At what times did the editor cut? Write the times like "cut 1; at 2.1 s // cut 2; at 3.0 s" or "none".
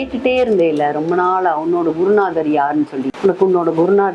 cut 1; at 3.1 s